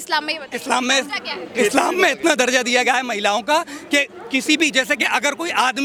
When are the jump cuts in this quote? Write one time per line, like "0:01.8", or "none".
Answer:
none